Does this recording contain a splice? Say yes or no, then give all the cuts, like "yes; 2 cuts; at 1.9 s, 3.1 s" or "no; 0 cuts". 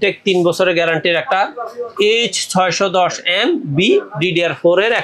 no; 0 cuts